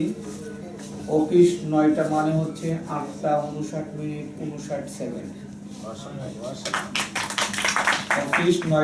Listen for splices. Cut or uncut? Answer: uncut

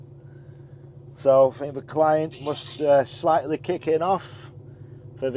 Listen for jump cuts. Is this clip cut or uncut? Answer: uncut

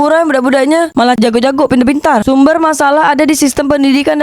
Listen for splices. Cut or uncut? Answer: cut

